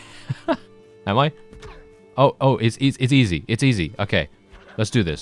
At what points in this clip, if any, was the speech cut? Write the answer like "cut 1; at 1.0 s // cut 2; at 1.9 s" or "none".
none